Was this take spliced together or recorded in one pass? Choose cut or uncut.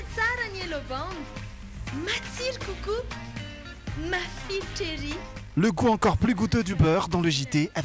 uncut